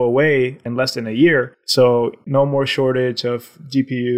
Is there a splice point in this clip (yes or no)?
yes